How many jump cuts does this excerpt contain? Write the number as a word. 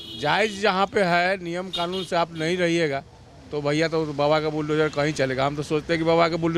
zero